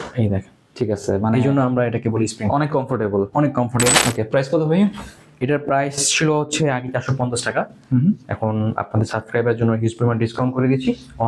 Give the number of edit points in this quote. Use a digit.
1